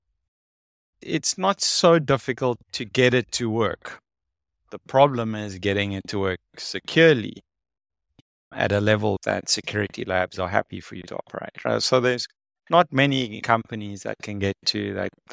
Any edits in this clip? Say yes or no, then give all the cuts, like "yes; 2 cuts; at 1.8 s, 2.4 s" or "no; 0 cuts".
yes; 4 cuts; at 1.0 s, 2.7 s, 9.2 s, 13.4 s